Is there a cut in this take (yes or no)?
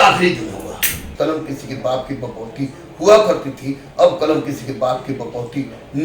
yes